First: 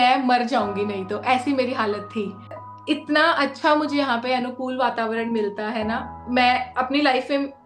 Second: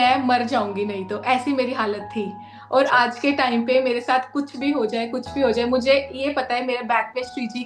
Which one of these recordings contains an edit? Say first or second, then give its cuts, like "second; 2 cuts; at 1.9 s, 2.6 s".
first; 1 cut; at 2.6 s